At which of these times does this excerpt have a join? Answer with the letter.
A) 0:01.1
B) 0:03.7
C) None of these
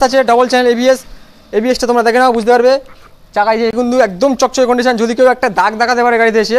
B